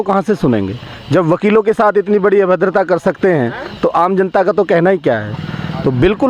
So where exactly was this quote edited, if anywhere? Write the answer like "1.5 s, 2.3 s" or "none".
none